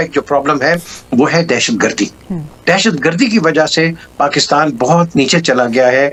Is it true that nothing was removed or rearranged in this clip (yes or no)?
yes